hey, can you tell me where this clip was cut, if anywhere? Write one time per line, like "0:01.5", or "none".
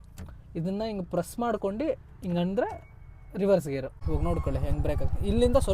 0:04.0